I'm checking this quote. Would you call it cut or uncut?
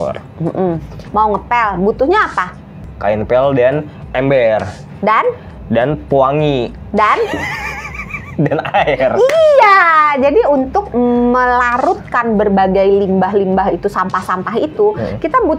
cut